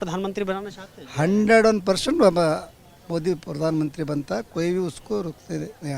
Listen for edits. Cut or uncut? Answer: uncut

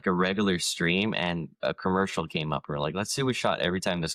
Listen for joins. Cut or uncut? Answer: uncut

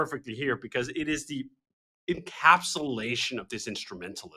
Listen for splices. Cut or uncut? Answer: uncut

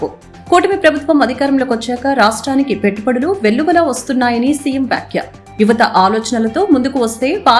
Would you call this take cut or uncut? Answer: uncut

